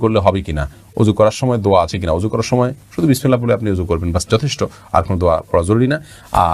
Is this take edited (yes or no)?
no